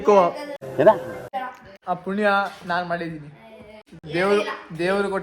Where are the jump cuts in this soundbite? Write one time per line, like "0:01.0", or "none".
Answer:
0:04.0